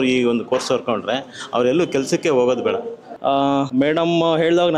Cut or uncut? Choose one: cut